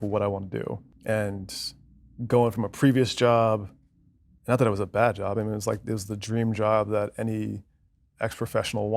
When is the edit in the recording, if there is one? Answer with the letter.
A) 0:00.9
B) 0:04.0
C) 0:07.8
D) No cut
A